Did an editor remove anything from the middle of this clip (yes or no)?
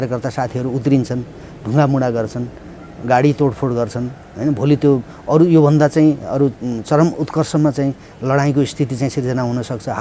no